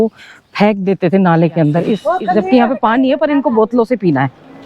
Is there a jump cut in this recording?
yes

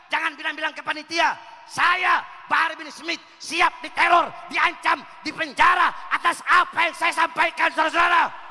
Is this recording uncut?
yes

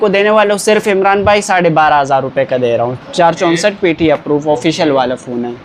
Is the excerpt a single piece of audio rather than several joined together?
yes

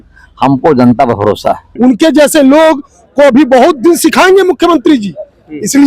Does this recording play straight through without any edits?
no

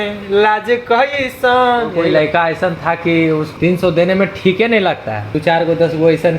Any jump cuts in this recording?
yes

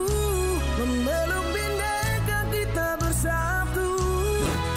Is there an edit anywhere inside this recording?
no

